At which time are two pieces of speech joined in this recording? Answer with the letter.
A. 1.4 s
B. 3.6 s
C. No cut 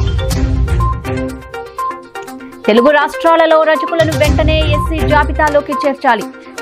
A